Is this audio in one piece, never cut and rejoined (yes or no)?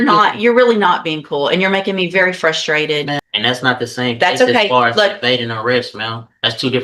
no